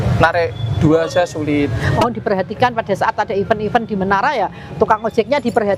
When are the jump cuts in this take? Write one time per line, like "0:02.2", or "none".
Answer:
0:01.9